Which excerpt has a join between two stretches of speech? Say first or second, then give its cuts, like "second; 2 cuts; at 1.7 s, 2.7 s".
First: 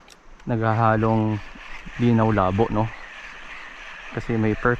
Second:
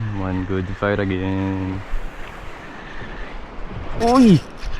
second; 1 cut; at 2.8 s